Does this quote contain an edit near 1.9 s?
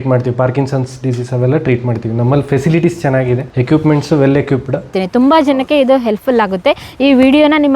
no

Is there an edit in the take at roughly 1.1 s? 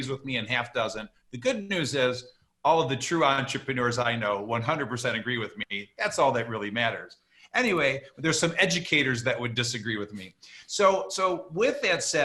no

